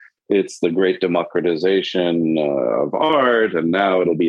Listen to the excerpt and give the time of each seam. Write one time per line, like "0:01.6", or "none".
0:03.1